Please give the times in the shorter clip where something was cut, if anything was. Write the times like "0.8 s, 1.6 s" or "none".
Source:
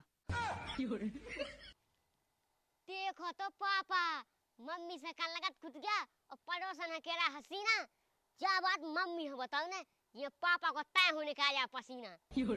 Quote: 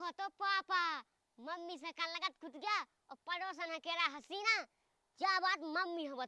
none

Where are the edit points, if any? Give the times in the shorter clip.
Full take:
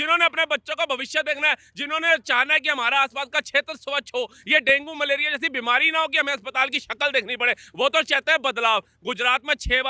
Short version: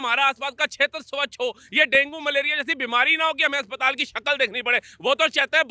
none

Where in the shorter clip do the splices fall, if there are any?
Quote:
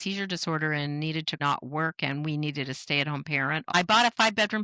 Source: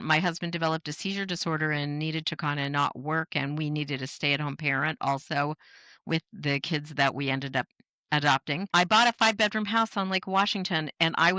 1.4 s, 3.7 s

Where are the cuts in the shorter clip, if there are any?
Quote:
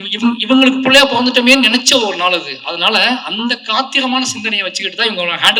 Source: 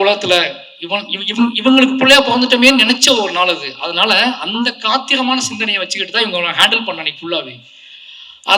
none

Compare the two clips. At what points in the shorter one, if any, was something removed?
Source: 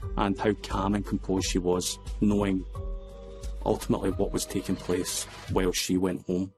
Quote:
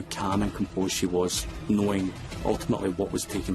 2.3 s

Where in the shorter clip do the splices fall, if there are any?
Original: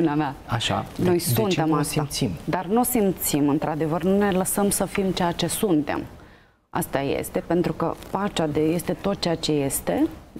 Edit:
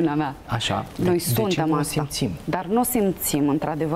none

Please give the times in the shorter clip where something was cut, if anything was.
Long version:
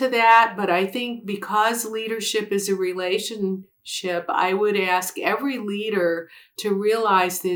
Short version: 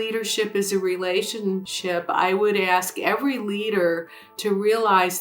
1.7 s

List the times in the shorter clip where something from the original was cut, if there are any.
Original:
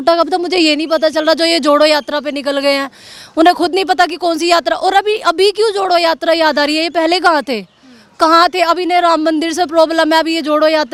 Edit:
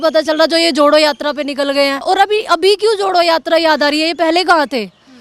2.0 s

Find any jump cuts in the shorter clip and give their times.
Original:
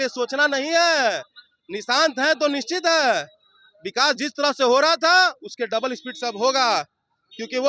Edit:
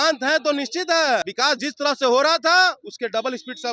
1.3 s

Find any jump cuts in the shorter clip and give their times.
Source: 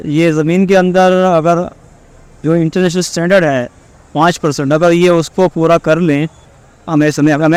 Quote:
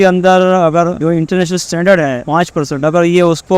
1.0 s, 2.2 s

